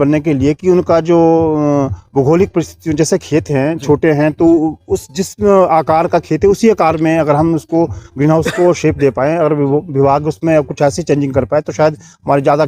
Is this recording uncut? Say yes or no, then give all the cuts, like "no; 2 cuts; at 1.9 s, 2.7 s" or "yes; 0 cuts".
yes; 0 cuts